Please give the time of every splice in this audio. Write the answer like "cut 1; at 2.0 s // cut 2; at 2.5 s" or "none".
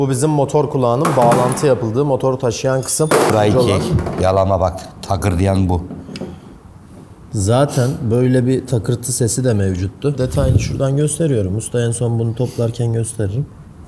cut 1; at 3.3 s // cut 2; at 10.2 s

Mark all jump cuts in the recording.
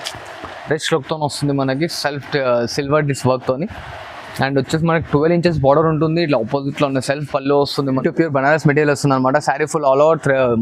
cut 1; at 8.0 s

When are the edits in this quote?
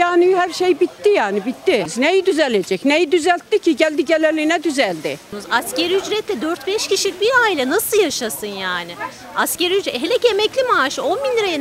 cut 1; at 1.9 s // cut 2; at 5.2 s

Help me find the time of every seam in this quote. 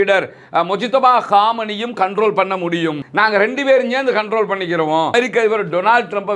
cut 1; at 5.1 s

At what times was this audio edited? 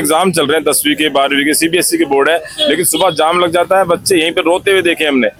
none

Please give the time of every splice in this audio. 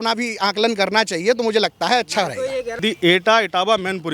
cut 1; at 2.8 s

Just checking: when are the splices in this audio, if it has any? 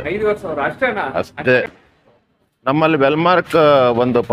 cut 1; at 1.8 s

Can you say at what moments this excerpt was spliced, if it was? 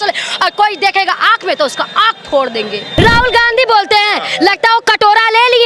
cut 1; at 2.9 s

